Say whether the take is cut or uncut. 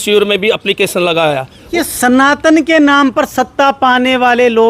cut